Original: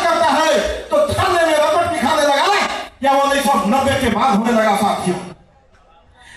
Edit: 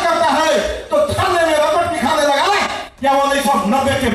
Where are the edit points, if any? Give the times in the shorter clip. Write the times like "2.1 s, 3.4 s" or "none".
none